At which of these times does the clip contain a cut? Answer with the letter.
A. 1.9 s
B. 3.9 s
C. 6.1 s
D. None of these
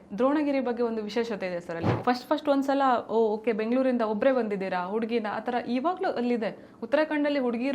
A